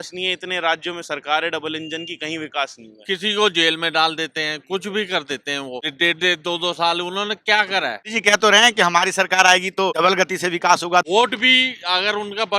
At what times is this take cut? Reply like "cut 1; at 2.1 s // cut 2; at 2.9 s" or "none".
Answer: cut 1; at 2.9 s // cut 2; at 5.9 s // cut 3; at 8.1 s // cut 4; at 10.0 s // cut 5; at 11.1 s